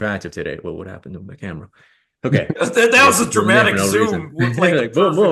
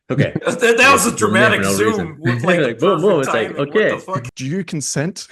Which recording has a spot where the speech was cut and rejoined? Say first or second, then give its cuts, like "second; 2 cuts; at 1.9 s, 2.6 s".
second; 1 cut; at 4.2 s